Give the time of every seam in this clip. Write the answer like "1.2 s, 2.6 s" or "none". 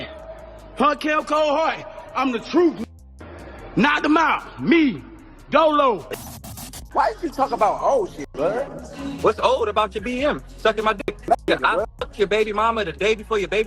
6.7 s, 11.3 s